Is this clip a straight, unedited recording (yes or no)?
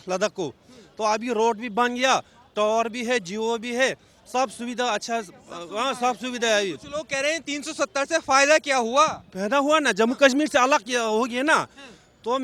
yes